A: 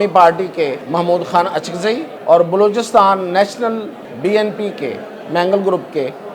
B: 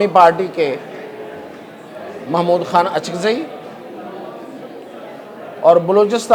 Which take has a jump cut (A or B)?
A